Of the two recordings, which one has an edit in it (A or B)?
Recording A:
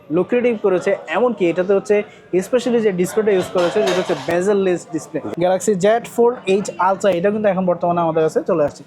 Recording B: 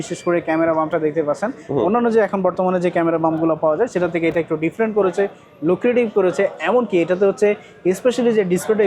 A